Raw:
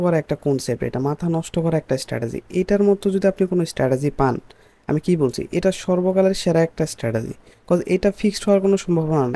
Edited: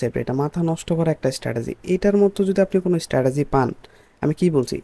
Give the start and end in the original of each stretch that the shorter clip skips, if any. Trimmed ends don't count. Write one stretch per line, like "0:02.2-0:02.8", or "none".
none